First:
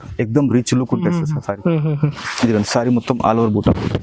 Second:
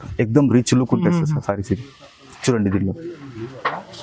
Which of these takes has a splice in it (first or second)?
first